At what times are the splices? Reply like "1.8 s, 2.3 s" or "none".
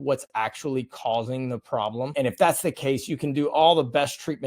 2.1 s